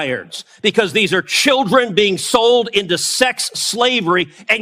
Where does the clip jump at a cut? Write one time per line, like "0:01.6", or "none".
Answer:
none